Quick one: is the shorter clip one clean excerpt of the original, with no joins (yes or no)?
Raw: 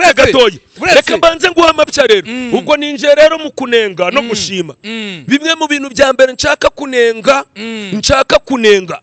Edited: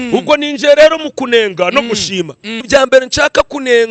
no